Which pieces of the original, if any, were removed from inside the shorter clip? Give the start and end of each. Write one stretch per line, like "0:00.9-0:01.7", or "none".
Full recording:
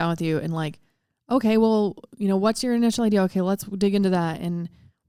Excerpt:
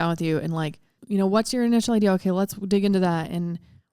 0:01.0-0:02.1